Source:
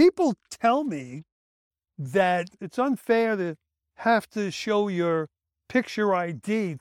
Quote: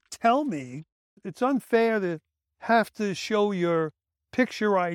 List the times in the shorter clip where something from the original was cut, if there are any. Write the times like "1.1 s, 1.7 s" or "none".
1.2 s

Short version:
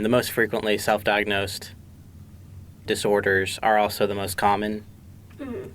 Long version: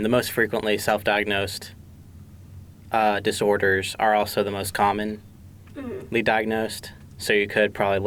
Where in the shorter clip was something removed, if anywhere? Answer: 2.9 s

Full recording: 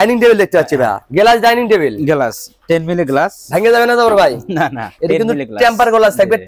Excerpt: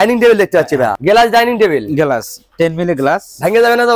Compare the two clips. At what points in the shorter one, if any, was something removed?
1.0 s

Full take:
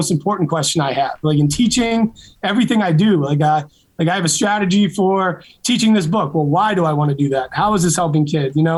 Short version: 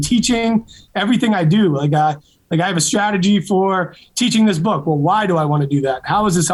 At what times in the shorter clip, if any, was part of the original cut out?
none

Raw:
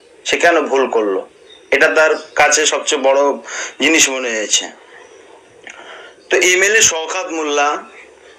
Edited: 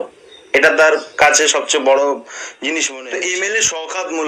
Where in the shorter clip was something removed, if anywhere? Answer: 2.9 s

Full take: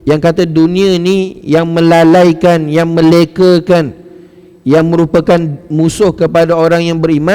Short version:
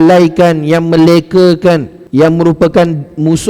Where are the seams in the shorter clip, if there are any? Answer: 2.0 s

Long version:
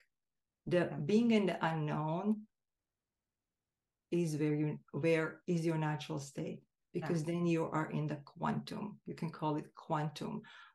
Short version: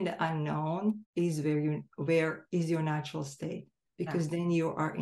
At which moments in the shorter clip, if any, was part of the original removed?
1.0 s

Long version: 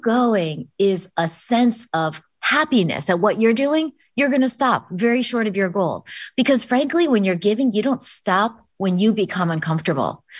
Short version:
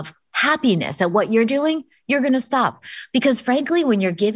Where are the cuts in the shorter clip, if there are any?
2.8 s

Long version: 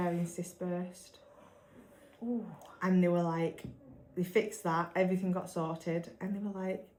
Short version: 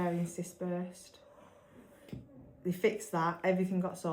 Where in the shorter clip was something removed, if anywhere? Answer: 2.1 s

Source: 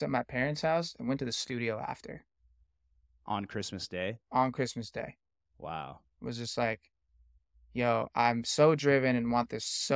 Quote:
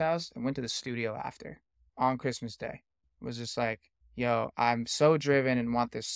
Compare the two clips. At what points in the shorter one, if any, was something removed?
1.9 s, 3.0 s, 4.0 s

